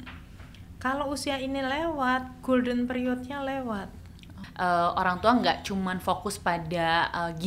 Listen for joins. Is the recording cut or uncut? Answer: cut